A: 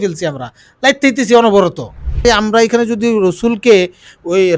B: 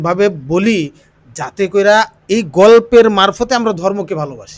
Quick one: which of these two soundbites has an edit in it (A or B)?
A